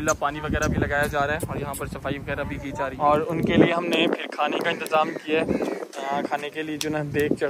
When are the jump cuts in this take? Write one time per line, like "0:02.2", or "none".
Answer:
0:02.9